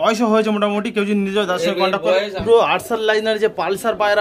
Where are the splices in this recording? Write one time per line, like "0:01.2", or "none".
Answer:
0:02.4